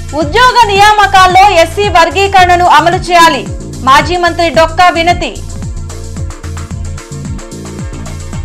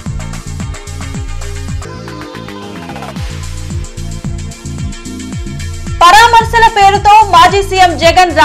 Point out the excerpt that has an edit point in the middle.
second; 1 cut; at 5.0 s

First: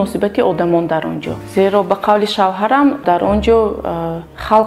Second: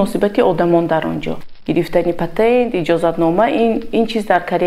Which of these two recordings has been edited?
second; 1 cut; at 1.5 s

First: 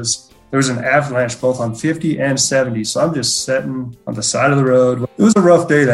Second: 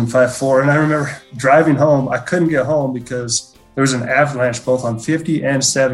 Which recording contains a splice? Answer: first; 2 cuts; at 4.0 s, 5.1 s

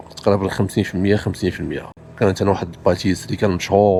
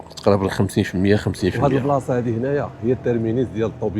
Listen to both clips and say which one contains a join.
second; 1 cut; at 1.6 s

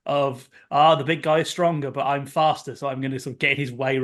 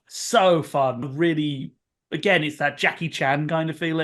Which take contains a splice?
second; 1 cut; at 1.1 s

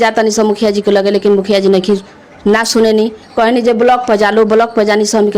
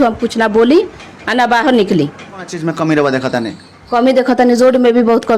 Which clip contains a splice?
second; 1 cut; at 2.6 s

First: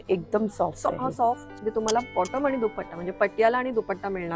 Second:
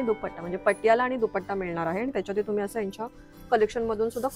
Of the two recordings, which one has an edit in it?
first; 1 cut; at 1.5 s

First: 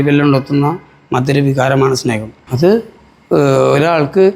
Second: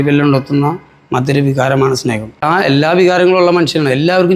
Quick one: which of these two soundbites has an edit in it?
second; 1 cut; at 2.4 s

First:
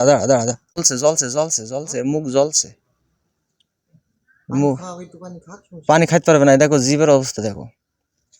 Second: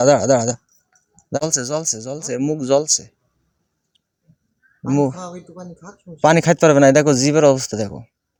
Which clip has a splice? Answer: first; 1 cut; at 1.0 s

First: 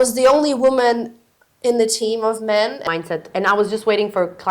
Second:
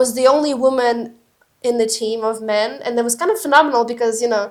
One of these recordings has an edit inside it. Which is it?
first; 1 cut; at 2.8 s

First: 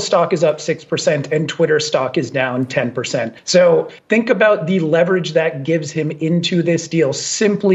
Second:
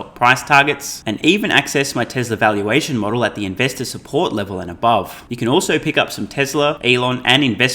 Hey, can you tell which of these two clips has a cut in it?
second; 2 cuts; at 5.2 s, 6.8 s

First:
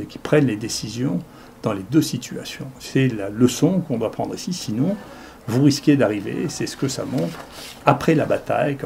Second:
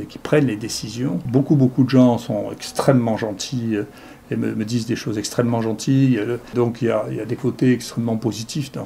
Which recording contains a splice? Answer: second; 2 cuts; at 1.2 s, 6.5 s

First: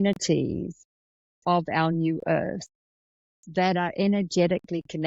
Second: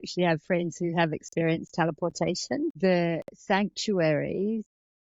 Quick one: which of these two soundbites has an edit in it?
second; 1 cut; at 2.8 s

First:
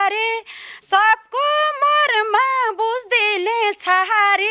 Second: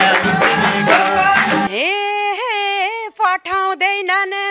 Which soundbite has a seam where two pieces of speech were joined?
second; 1 cut; at 1.7 s

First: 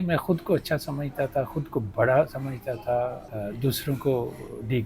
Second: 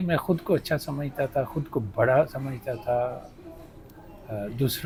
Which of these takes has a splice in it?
first; 1 cut; at 3.2 s

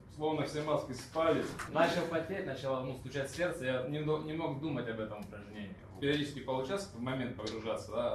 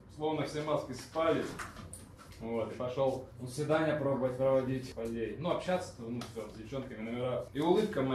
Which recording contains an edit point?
first; 2 cuts; at 1.6 s, 5.9 s

